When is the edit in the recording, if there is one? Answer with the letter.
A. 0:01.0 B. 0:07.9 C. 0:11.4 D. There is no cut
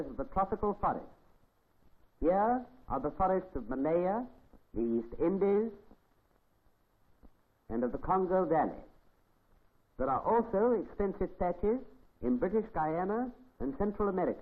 C